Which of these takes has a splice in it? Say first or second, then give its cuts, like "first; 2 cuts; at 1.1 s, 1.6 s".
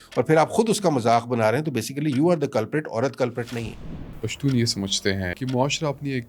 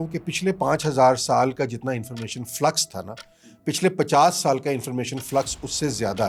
first; 2 cuts; at 4.2 s, 5.3 s